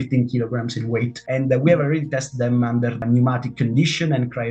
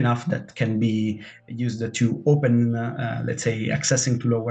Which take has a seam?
first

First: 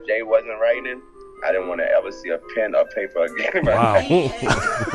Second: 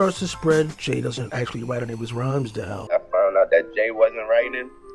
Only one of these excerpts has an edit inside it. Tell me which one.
second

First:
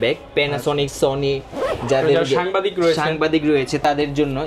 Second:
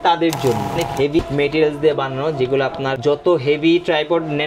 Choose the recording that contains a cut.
second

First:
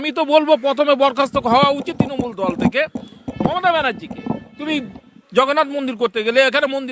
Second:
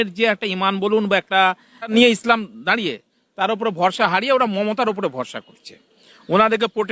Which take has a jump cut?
second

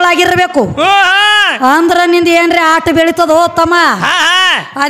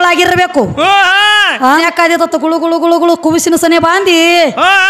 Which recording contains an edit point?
second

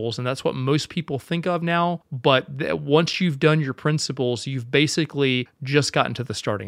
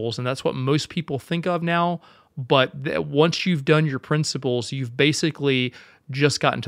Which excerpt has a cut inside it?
first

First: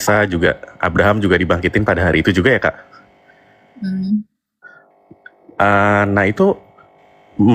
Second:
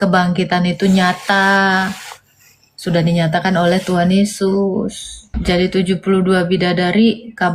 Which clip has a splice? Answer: second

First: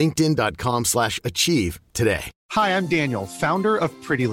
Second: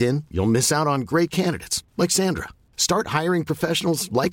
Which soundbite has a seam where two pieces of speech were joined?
first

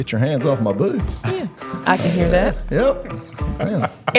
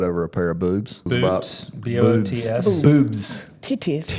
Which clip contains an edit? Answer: second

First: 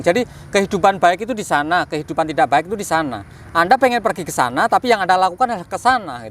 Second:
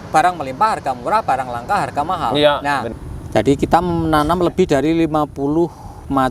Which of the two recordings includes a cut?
second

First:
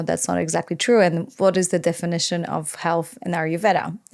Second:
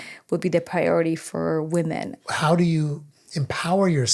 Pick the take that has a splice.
second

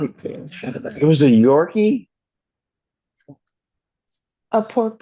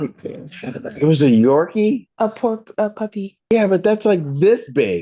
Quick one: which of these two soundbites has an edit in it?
second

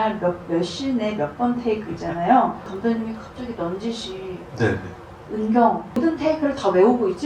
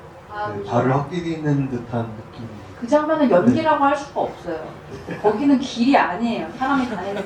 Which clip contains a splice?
first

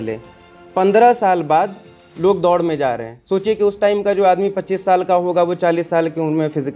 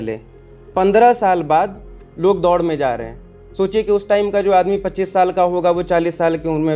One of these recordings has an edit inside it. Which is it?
first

